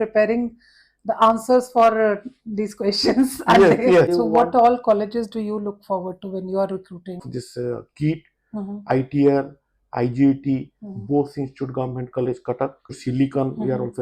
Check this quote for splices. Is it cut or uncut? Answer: cut